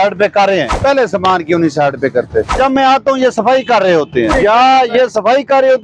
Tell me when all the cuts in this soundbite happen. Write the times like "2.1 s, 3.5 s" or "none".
0.8 s, 2.5 s, 4.3 s

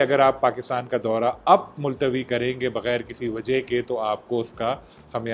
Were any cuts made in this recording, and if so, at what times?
none

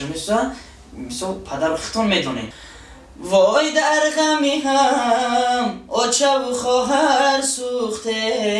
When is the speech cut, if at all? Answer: 2.5 s

